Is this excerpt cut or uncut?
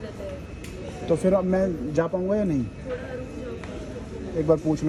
uncut